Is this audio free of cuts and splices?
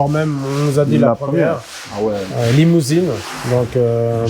yes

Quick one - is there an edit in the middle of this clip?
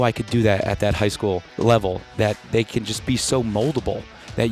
yes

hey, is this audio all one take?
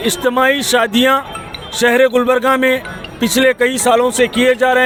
yes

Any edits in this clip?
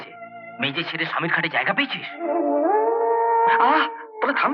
yes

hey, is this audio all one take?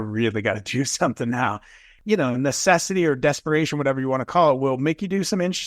no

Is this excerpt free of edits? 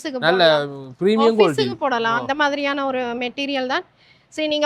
yes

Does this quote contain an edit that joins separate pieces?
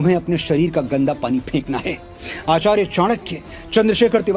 no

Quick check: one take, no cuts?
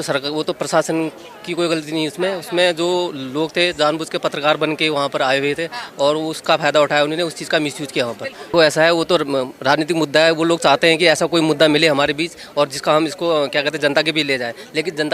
no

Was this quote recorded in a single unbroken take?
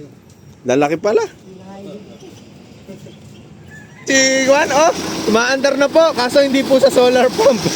no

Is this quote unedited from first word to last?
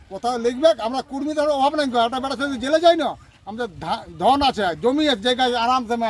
yes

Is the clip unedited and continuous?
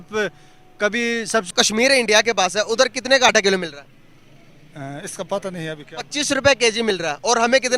no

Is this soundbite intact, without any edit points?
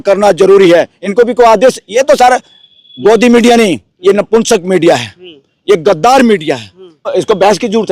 no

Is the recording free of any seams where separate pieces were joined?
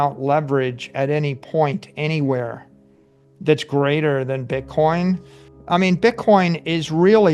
no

